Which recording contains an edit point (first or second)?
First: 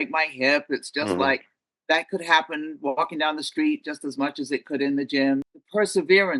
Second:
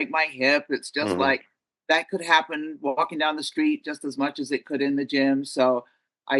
first